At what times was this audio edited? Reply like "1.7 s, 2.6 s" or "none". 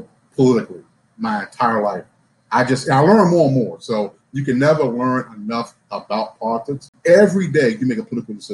6.8 s